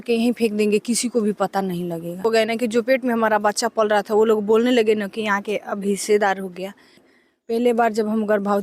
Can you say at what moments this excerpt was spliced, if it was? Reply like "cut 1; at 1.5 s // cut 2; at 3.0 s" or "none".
cut 1; at 2.2 s // cut 2; at 7.1 s